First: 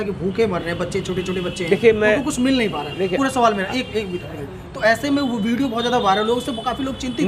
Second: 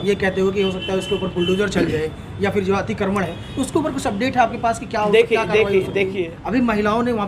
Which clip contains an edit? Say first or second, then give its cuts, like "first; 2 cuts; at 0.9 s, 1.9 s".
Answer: second; 1 cut; at 6.3 s